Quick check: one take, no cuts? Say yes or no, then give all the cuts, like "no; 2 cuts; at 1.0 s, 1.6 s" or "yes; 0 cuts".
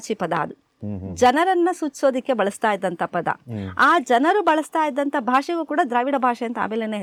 yes; 0 cuts